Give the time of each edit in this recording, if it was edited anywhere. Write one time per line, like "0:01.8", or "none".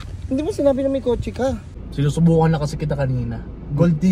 0:01.7